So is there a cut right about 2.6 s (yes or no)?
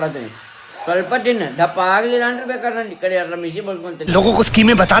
no